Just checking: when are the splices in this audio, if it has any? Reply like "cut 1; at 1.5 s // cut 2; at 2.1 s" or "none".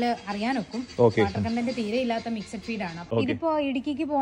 cut 1; at 3.0 s